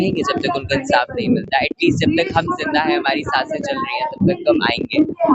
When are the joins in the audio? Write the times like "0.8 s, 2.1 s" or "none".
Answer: none